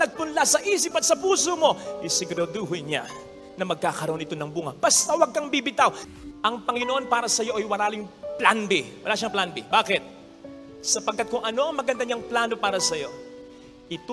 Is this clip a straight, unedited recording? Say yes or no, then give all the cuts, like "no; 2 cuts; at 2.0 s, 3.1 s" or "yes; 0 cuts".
no; 1 cut; at 6.1 s